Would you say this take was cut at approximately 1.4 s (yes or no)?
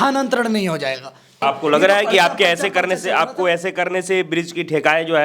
yes